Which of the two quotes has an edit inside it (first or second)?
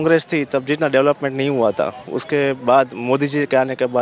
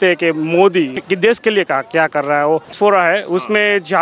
second